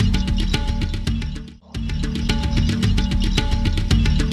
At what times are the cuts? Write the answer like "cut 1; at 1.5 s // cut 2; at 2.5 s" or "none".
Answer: cut 1; at 2.2 s